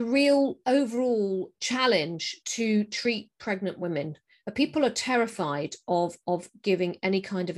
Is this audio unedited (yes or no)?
yes